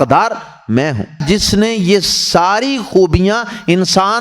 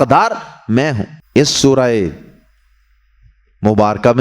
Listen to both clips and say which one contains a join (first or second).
first